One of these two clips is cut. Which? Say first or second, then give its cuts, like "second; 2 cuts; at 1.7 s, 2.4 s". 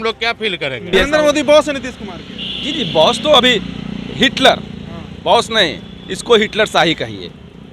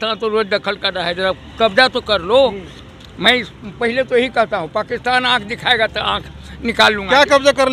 first; 1 cut; at 0.9 s